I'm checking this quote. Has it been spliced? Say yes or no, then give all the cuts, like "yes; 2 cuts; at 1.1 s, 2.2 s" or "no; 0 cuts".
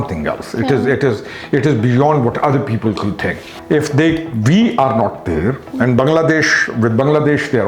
yes; 1 cut; at 3.5 s